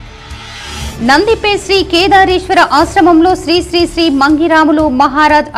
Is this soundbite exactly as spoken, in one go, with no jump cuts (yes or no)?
yes